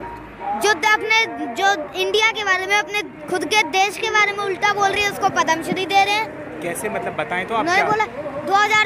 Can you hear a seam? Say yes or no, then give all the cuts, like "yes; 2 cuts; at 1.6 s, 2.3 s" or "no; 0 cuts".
no; 0 cuts